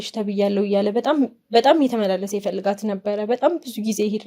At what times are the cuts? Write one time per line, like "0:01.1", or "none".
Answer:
none